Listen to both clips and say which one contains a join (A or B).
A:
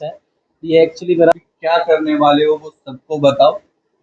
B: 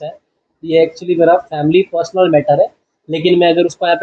A